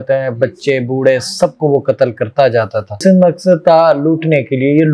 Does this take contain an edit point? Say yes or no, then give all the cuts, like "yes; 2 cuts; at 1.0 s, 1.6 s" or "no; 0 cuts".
yes; 1 cut; at 3.0 s